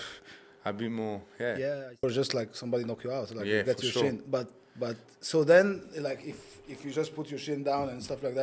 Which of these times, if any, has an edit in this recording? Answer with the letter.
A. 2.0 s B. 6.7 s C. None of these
A